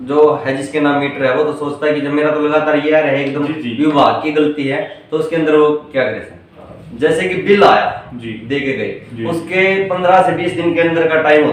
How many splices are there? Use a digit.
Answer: 1